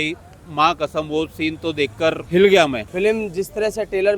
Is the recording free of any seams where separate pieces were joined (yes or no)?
no